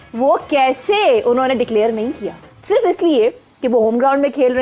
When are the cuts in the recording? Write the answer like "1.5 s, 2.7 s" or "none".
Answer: none